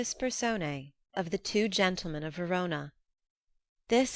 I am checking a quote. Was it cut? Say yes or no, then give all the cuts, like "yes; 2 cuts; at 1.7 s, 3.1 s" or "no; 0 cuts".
yes; 1 cut; at 1.0 s